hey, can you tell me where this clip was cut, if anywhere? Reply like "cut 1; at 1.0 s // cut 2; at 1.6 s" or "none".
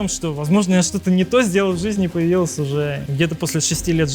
cut 1; at 3.0 s